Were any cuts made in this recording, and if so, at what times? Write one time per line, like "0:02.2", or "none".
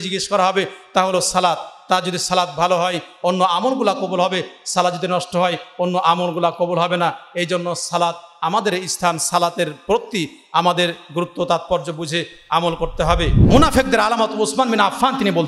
0:13.4